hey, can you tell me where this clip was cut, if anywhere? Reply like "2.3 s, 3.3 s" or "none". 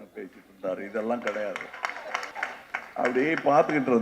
2.3 s